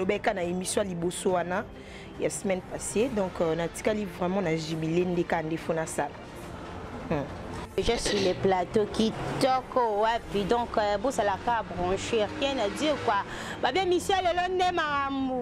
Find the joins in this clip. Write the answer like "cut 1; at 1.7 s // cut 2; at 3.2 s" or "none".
cut 1; at 7.6 s

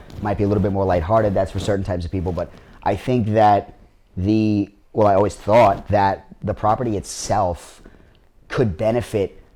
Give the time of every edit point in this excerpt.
none

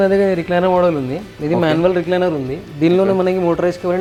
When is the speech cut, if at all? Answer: none

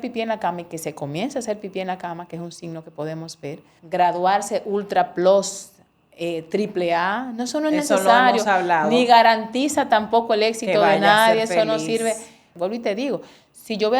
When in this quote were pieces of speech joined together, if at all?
cut 1; at 3.7 s // cut 2; at 12.5 s

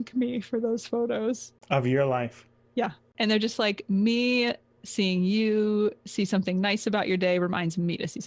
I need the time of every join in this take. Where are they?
cut 1; at 1.5 s // cut 2; at 3.0 s

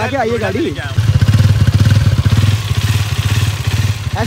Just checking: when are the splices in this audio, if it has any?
cut 1; at 1.0 s

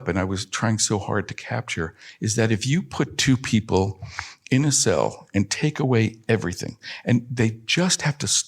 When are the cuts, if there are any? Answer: cut 1; at 6.9 s

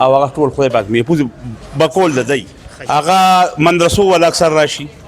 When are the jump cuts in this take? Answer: cut 1; at 2.5 s

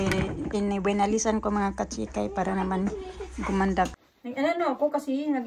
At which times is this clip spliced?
cut 1; at 3.9 s

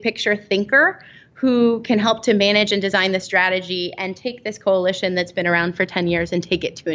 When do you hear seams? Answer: none

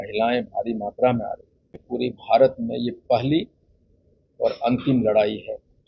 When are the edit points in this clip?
cut 1; at 1.8 s

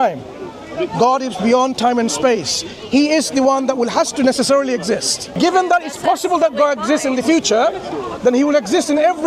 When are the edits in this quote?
cut 1; at 5.3 s

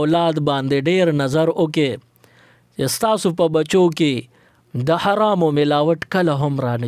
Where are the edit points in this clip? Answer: none

